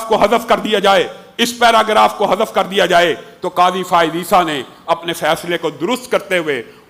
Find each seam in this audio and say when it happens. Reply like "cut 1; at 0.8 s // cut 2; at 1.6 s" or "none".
none

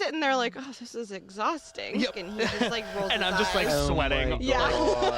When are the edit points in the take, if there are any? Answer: cut 1; at 2.1 s

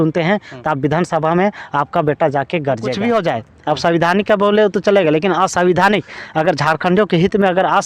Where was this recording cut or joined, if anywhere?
cut 1; at 3.0 s

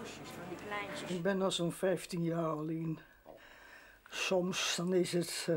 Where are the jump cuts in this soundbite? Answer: cut 1; at 1.1 s

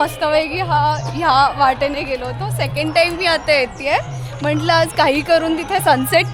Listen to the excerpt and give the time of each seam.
none

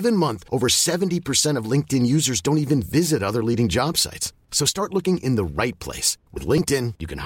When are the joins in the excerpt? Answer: none

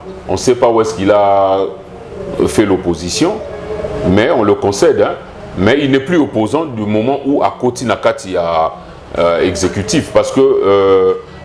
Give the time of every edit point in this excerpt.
none

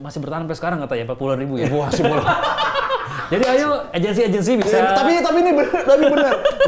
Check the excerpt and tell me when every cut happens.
none

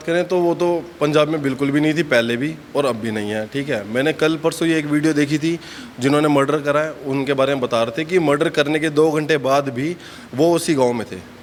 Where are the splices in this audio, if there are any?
none

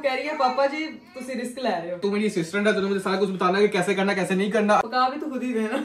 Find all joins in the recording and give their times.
cut 1; at 2.0 s // cut 2; at 4.8 s

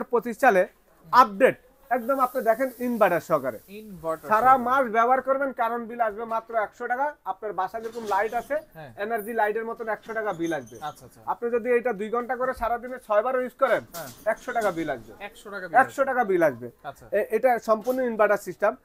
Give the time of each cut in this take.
none

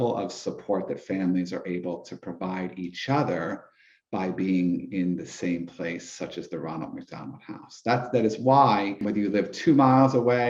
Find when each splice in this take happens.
cut 1; at 9.0 s

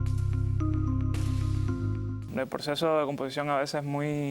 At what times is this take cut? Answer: cut 1; at 2.2 s

